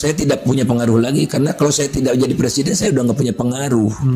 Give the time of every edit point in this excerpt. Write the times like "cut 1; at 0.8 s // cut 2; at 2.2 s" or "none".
none